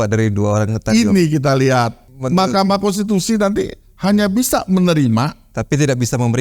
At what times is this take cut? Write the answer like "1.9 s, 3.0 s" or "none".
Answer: 2.1 s